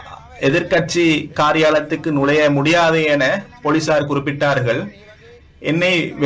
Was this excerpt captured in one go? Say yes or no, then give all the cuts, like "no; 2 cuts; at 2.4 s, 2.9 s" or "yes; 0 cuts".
yes; 0 cuts